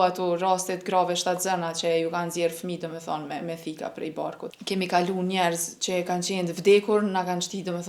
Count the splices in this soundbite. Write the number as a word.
one